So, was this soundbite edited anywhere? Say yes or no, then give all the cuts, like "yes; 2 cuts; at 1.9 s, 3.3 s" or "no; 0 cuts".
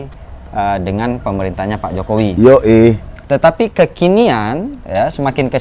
yes; 1 cut; at 3.1 s